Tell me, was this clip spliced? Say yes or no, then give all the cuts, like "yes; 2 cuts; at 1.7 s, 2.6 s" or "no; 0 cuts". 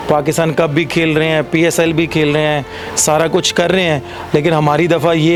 no; 0 cuts